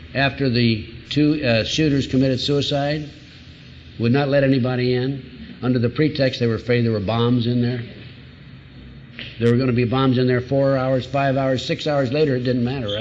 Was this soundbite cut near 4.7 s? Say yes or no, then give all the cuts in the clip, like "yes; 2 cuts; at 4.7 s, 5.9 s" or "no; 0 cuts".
no; 0 cuts